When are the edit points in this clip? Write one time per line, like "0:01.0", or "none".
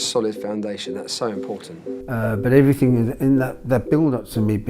0:01.9